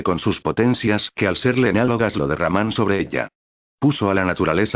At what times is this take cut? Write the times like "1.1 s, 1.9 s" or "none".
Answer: 2.1 s